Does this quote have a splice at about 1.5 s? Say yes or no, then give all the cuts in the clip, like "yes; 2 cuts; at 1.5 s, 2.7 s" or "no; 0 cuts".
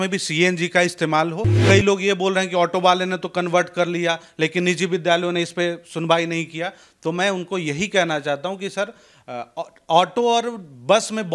yes; 1 cut; at 1.5 s